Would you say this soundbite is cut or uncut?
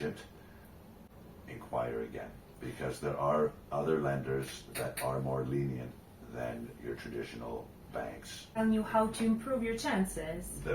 cut